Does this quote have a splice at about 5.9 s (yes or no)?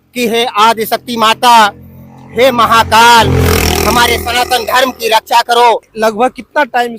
yes